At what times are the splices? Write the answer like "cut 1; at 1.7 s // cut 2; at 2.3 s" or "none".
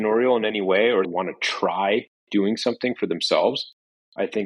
cut 1; at 1.1 s